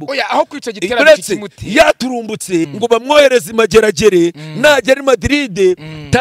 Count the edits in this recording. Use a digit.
1